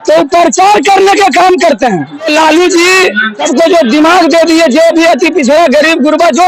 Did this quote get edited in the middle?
no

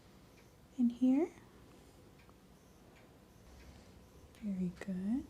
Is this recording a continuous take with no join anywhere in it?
no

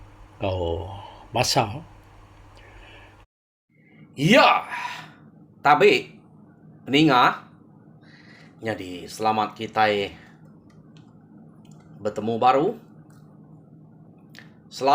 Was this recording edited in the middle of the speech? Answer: yes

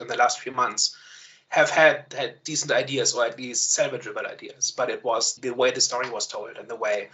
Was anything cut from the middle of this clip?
yes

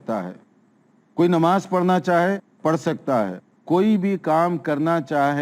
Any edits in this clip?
yes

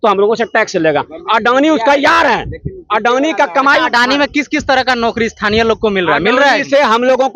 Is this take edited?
no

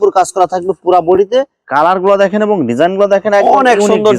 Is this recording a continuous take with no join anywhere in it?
no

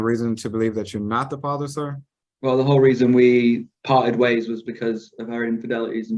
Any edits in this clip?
no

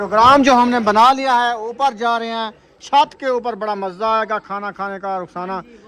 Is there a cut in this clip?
no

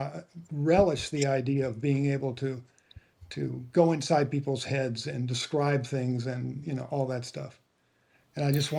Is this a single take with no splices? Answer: yes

